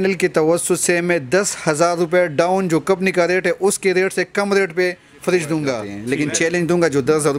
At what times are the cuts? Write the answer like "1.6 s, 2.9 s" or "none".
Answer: 5.9 s